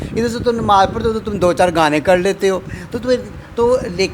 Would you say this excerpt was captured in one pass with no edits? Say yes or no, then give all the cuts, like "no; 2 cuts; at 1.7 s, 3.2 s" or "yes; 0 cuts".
yes; 0 cuts